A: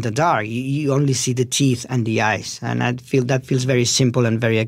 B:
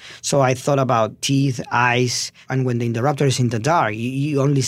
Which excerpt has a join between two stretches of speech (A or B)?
B